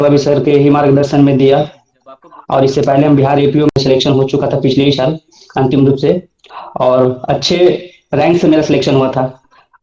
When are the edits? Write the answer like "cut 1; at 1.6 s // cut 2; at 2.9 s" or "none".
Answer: none

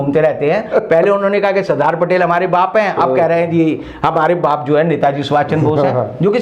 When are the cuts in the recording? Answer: none

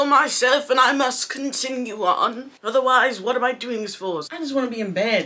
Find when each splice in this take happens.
cut 1; at 4.3 s

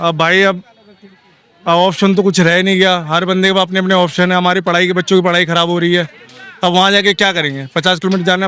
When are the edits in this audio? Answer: none

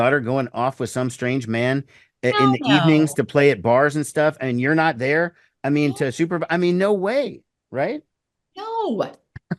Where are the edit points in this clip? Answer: none

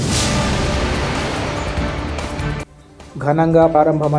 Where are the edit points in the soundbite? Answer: cut 1; at 2.5 s

